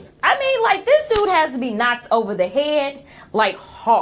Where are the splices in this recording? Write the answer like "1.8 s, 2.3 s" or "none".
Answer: none